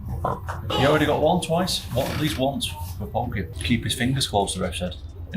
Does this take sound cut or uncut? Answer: cut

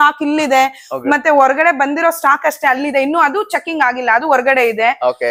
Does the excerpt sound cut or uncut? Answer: uncut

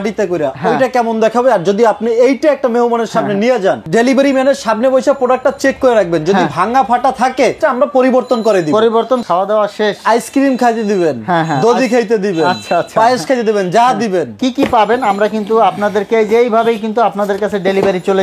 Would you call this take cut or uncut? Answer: cut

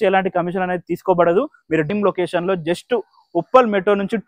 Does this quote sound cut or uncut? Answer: cut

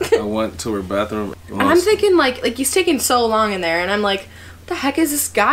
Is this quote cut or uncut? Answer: cut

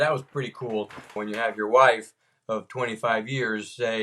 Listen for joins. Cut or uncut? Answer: cut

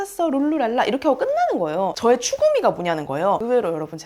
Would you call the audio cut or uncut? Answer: cut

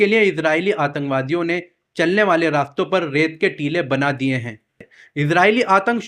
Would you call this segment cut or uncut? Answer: cut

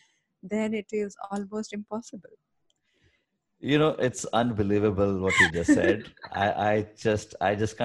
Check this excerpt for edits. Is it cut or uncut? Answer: uncut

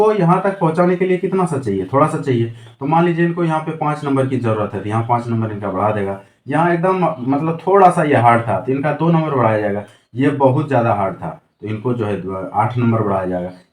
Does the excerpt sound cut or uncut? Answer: uncut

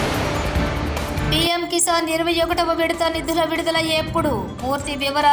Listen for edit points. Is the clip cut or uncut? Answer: cut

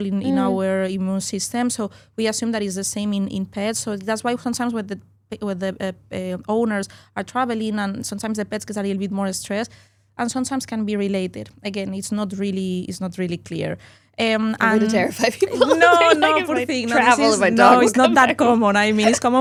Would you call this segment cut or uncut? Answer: uncut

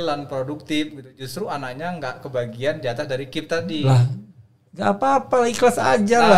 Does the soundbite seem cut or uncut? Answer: uncut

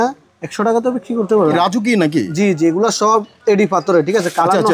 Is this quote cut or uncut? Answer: cut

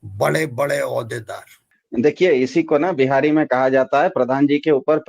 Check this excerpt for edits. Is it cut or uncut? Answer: uncut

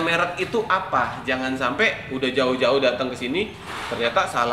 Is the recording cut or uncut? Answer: uncut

